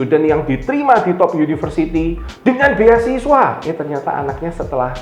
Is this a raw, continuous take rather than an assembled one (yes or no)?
no